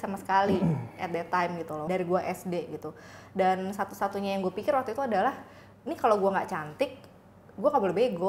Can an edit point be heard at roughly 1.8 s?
yes; 1 cut; at 1.8 s

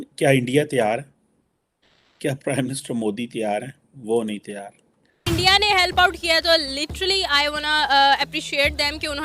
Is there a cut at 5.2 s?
yes; 1 cut; at 5.2 s

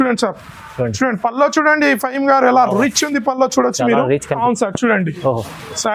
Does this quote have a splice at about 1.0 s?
no; 1 cut; at 4.4 s

